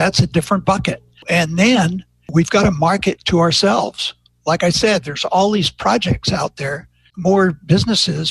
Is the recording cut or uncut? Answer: cut